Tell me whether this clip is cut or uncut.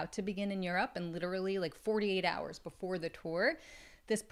uncut